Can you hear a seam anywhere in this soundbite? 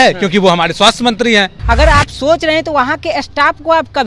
yes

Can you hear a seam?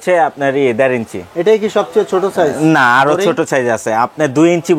no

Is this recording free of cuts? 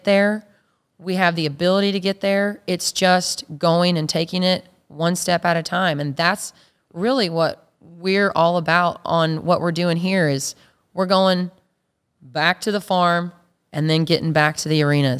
yes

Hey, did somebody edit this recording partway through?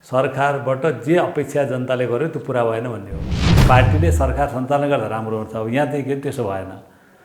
yes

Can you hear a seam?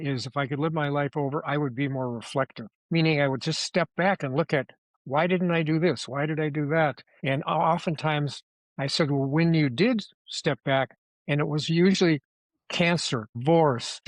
no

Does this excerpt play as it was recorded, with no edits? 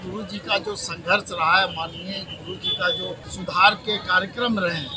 no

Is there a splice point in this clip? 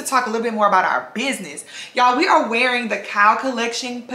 no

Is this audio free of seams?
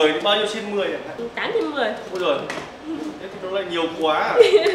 yes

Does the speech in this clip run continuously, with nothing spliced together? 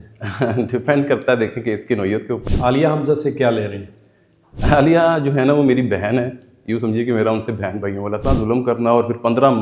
no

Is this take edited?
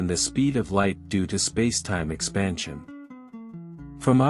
yes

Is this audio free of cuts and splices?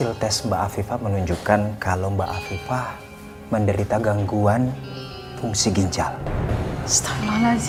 yes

